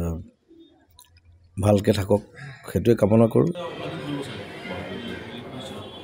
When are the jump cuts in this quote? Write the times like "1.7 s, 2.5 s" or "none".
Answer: 3.6 s